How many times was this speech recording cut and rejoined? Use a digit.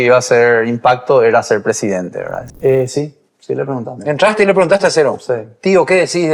1